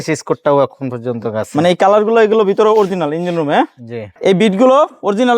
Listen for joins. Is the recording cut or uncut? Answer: cut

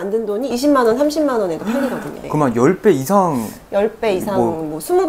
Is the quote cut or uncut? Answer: uncut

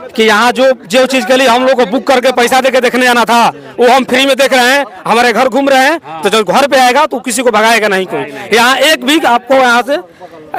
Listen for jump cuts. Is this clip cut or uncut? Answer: uncut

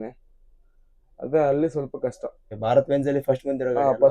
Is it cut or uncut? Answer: cut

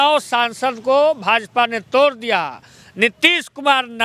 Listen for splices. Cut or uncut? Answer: uncut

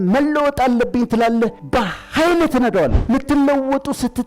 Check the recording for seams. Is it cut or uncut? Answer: cut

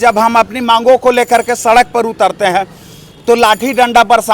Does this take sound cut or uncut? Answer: uncut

